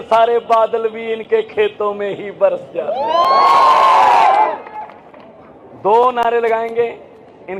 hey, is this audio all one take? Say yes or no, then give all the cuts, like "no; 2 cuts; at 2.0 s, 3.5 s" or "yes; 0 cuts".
yes; 0 cuts